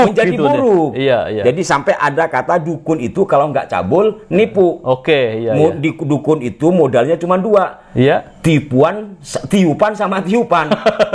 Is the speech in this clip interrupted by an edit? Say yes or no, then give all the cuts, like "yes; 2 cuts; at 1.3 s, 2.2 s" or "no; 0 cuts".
no; 0 cuts